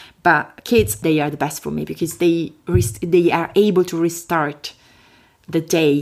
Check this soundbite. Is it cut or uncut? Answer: cut